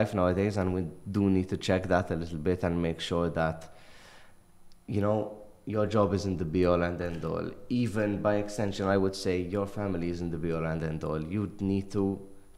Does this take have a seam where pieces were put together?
no; 0 cuts

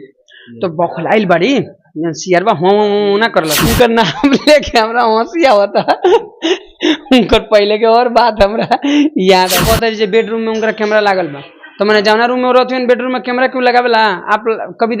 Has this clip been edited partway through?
yes; 2 cuts; at 3.6 s, 9.6 s

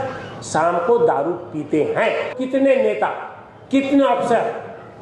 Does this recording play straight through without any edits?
no; 1 cut; at 2.3 s

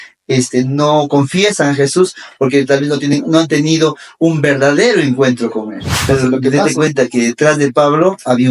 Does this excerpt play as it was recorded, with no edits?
no; 1 cut; at 6.0 s

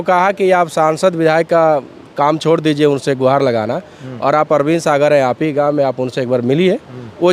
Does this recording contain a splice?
no; 0 cuts

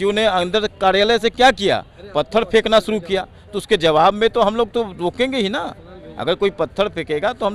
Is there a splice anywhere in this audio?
no; 0 cuts

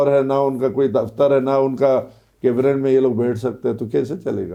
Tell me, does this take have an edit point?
no; 0 cuts

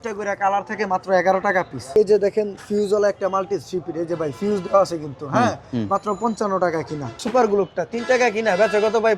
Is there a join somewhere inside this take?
yes; 2 cuts; at 2.0 s, 7.1 s

